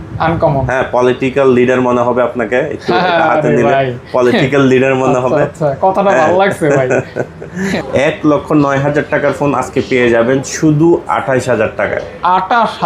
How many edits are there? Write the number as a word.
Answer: one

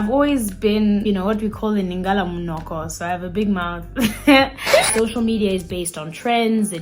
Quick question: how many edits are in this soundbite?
two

